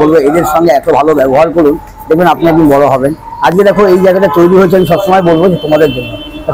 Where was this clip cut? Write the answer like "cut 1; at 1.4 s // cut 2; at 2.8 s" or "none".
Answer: none